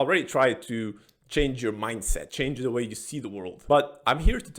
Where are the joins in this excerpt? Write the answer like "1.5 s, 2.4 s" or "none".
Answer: 2.2 s, 3.5 s